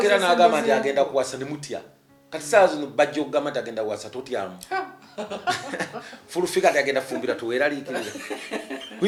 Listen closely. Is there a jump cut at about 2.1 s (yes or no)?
no